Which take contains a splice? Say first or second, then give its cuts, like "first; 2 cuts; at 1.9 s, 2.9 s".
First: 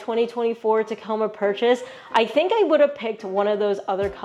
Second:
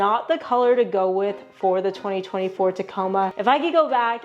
second; 1 cut; at 3.4 s